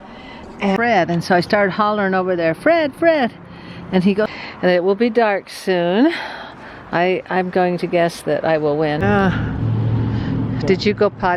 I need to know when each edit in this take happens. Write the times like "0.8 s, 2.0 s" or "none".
0.8 s, 4.3 s, 9.0 s